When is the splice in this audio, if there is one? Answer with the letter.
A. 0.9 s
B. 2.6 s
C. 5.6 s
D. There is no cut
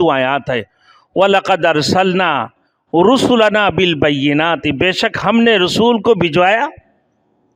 D